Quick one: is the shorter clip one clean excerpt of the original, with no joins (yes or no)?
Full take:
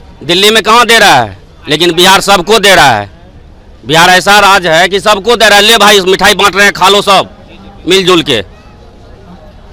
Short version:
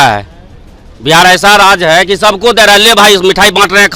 yes